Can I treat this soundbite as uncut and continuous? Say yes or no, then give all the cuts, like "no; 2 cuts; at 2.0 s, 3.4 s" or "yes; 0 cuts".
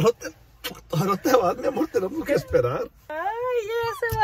no; 1 cut; at 3.1 s